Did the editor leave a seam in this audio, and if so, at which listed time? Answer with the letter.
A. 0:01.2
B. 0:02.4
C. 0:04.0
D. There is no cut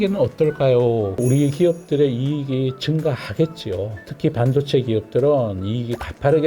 A